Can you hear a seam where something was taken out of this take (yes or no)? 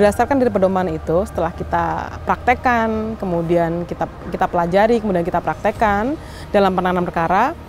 no